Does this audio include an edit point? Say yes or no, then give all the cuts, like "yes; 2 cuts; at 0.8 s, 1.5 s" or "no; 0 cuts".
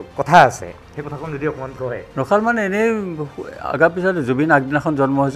no; 0 cuts